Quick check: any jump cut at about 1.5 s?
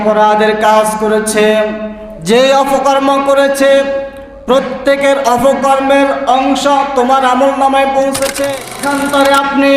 no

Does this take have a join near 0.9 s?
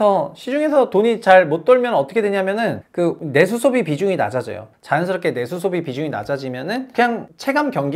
no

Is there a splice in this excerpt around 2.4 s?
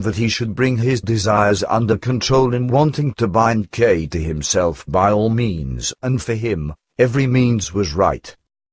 no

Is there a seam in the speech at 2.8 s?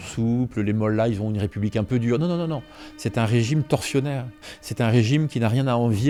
no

